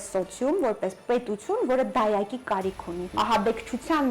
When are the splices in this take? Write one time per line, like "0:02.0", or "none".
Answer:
0:03.1